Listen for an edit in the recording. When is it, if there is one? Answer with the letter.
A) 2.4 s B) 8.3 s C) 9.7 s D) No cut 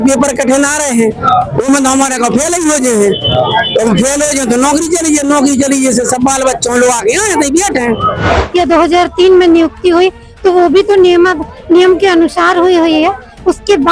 B